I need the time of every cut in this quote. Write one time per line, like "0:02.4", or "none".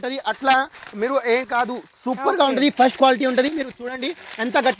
none

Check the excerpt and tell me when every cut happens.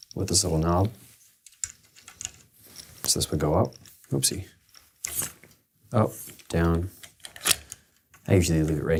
none

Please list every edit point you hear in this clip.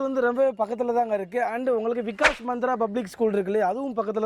none

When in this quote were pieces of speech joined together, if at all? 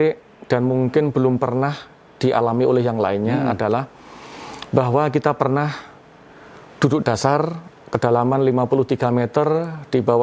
none

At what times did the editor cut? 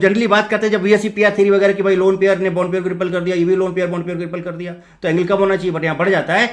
none

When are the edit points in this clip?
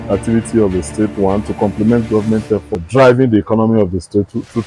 0:02.7

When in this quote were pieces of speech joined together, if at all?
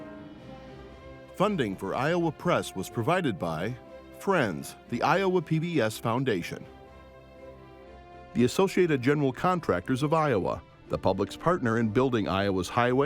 0:01.3
0:06.6
0:08.3

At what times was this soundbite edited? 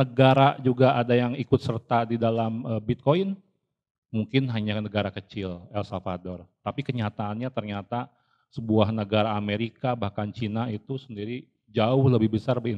none

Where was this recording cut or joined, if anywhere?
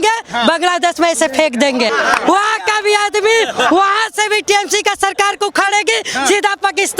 0:01.9

